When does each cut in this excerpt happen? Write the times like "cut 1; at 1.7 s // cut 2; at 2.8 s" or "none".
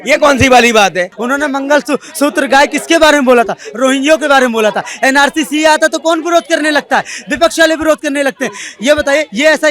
cut 1; at 1.1 s